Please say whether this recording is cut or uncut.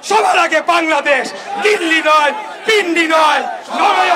uncut